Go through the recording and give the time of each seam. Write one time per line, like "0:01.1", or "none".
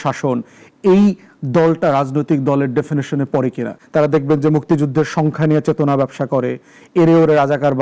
0:03.7